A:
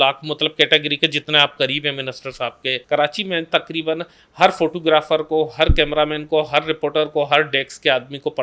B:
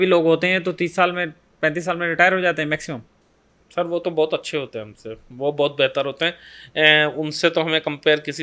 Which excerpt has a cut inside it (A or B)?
A